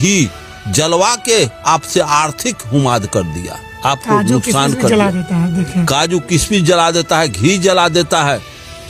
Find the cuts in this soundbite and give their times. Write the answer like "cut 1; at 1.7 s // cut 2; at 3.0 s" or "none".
none

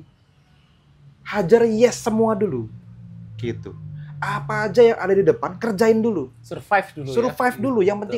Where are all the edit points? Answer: none

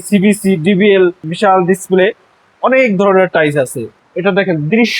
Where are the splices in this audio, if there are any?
cut 1; at 1.2 s // cut 2; at 3.9 s

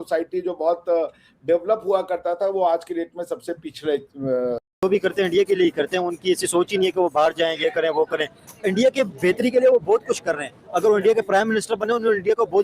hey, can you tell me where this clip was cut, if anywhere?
cut 1; at 4.6 s

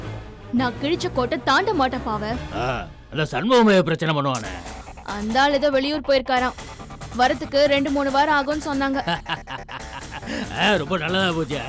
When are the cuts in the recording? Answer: none

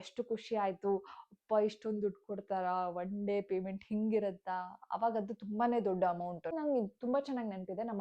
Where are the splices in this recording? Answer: cut 1; at 6.5 s

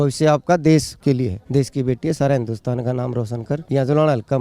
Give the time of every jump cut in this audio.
cut 1; at 1.1 s // cut 2; at 3.6 s

